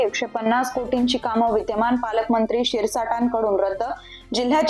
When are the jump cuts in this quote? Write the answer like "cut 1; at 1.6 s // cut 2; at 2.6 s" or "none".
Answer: none